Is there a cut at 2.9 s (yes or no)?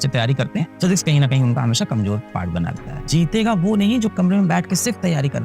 yes